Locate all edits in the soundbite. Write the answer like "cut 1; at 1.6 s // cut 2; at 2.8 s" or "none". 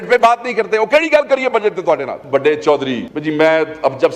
cut 1; at 2.2 s // cut 2; at 3.1 s